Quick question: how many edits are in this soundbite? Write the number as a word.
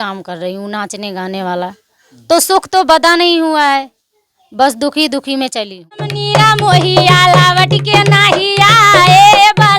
one